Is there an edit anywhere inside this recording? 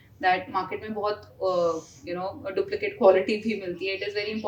no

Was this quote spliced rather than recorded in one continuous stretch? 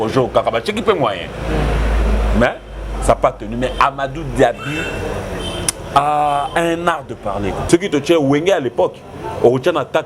yes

